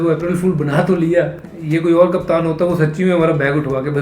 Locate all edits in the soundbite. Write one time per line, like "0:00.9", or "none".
0:01.4